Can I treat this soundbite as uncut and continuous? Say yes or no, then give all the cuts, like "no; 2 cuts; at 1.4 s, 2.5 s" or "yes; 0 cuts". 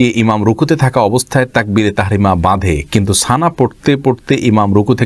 yes; 0 cuts